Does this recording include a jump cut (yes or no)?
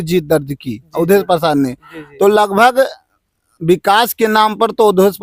no